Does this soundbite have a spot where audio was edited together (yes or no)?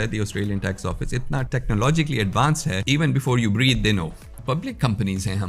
yes